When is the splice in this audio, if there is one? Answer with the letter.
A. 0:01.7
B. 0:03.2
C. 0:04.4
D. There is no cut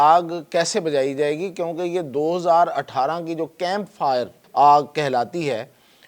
C